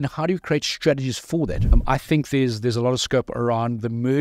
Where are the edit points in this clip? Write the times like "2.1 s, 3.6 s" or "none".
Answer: 1.7 s